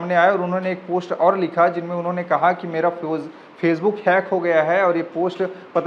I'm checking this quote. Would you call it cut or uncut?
uncut